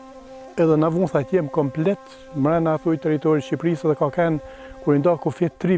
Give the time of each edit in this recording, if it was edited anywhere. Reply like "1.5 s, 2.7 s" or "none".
none

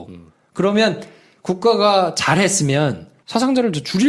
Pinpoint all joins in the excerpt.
2.1 s

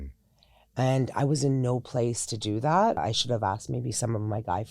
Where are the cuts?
3.0 s

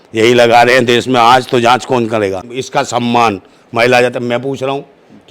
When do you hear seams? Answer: 2.6 s

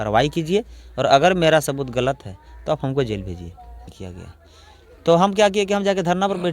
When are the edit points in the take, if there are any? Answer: 3.9 s

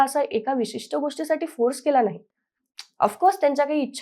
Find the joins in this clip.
none

